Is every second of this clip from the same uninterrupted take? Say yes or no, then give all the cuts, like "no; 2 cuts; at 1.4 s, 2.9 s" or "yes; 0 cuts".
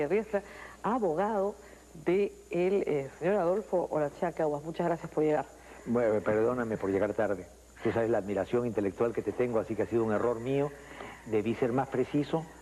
no; 1 cut; at 6.9 s